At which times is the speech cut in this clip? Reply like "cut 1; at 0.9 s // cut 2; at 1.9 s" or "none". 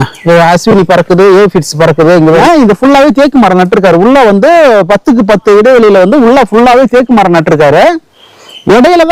cut 1; at 2.4 s